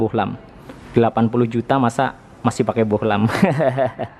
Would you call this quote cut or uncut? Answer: uncut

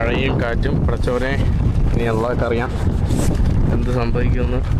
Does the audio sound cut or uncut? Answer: uncut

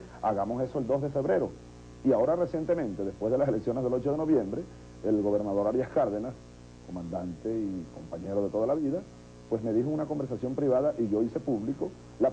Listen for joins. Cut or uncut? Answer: uncut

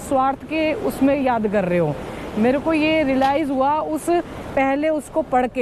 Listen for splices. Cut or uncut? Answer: uncut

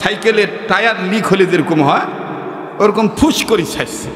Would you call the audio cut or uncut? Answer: uncut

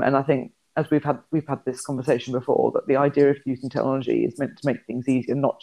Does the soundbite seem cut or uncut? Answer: uncut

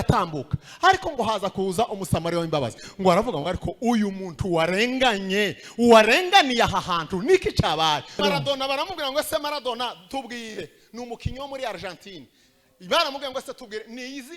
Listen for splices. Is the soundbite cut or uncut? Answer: cut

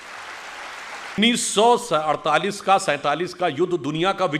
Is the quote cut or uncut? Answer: cut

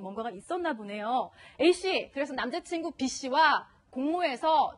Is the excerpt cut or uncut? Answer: cut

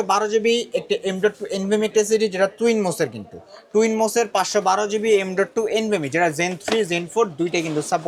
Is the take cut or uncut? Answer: uncut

